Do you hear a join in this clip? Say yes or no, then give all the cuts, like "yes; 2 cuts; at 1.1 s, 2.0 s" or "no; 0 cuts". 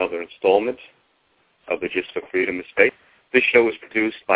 yes; 1 cut; at 3.1 s